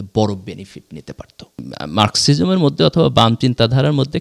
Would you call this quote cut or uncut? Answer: cut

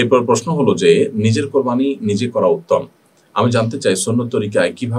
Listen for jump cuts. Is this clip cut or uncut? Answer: uncut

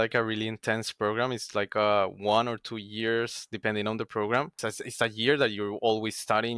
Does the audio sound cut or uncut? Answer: cut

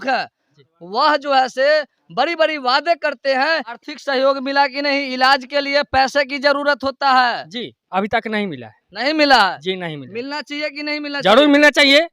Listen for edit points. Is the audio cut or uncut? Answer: cut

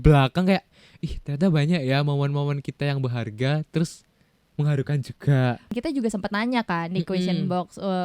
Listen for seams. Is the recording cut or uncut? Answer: cut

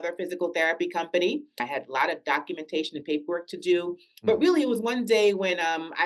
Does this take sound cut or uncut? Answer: cut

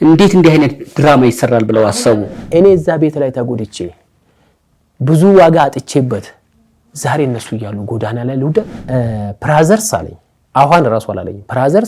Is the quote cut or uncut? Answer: cut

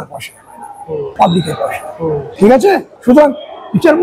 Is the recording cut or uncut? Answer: cut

